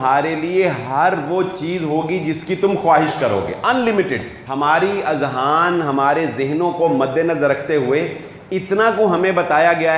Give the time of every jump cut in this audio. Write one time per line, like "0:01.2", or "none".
0:04.4